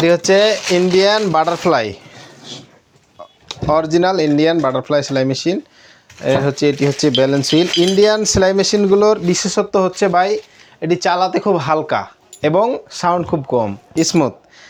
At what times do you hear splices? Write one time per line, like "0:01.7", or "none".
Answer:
none

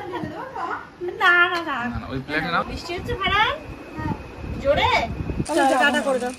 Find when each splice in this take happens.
0:02.6
0:05.4

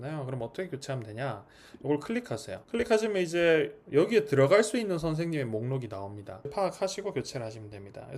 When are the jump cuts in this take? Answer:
0:06.5

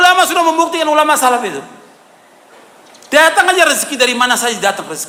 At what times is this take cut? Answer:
none

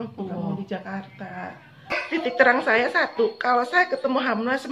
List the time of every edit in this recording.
0:02.0

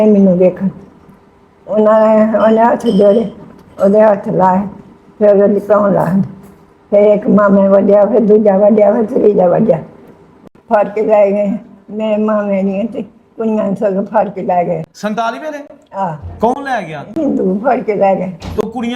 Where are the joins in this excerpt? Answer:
0:10.3

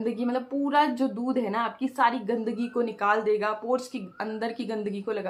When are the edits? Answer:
none

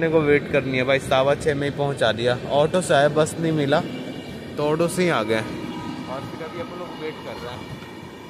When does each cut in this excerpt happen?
none

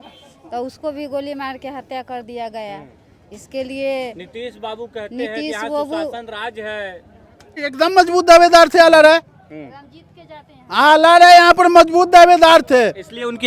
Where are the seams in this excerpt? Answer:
0:07.6

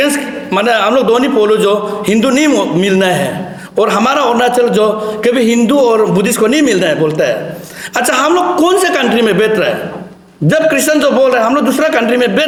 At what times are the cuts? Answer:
none

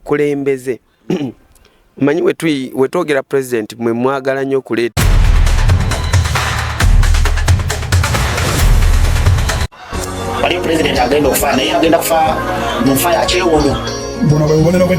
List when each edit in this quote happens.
0:04.9

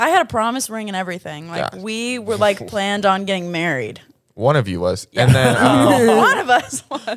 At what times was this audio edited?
none

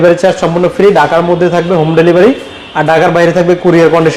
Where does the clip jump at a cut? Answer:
none

